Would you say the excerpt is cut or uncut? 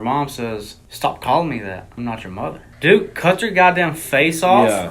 cut